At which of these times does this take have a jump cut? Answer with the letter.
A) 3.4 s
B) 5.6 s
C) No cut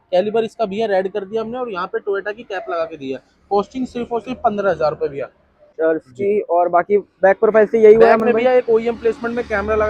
B